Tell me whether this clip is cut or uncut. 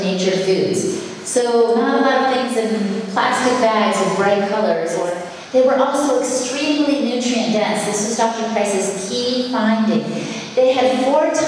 cut